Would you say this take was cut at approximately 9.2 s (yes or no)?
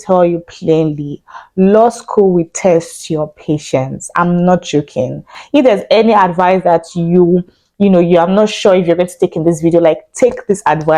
no